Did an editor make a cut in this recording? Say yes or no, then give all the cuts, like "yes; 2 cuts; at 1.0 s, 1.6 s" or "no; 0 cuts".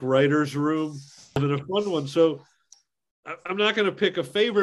yes; 2 cuts; at 1.4 s, 2.8 s